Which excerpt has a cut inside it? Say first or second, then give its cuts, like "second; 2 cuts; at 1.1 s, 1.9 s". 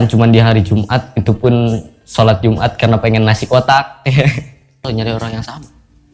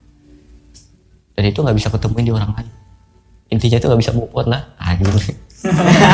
first; 1 cut; at 4.9 s